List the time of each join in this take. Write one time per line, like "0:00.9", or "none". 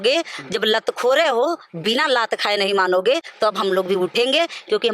none